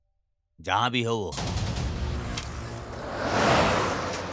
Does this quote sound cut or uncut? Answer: uncut